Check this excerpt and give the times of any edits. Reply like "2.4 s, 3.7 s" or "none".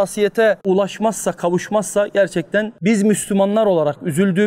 2.7 s